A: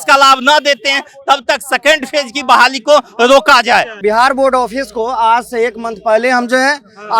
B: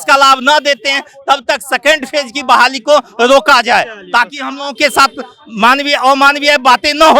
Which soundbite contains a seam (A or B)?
A